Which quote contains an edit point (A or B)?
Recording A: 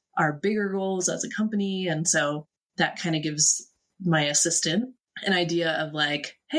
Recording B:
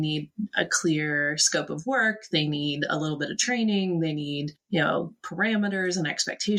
A